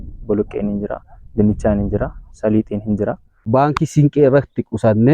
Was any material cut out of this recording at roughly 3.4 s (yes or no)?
yes